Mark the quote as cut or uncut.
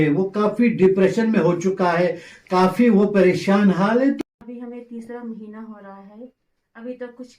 cut